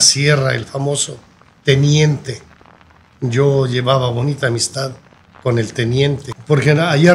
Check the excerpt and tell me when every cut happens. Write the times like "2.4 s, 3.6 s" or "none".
6.2 s